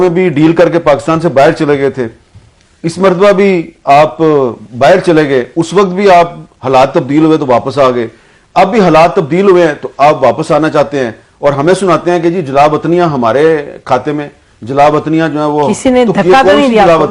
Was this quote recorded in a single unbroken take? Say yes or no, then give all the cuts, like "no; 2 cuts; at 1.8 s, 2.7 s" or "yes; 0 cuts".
yes; 0 cuts